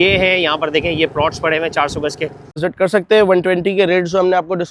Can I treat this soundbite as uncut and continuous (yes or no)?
no